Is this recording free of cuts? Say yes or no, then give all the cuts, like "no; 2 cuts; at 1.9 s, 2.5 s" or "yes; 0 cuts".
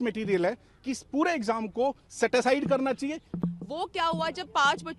no; 1 cut; at 3.3 s